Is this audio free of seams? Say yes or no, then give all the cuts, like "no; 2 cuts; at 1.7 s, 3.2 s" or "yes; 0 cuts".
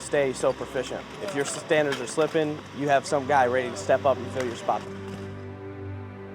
no; 2 cuts; at 1.0 s, 4.8 s